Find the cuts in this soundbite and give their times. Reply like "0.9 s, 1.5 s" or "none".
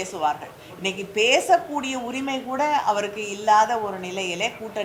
none